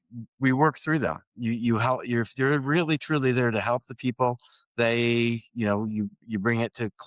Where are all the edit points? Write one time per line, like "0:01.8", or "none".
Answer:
none